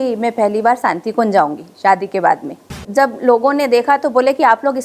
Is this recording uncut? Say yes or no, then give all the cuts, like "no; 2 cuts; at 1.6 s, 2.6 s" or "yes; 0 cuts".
no; 1 cut; at 2.8 s